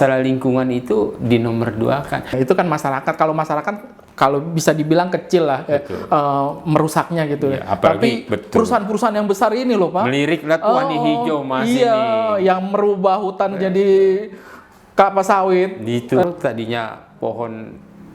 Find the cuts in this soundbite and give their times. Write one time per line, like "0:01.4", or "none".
0:02.3
0:16.2